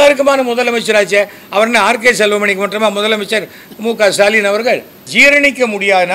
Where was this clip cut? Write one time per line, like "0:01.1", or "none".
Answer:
0:05.0